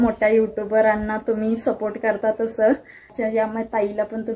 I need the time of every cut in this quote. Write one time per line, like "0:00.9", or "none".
0:03.1